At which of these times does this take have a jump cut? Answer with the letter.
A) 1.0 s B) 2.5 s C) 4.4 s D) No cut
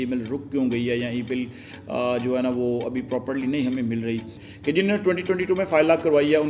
C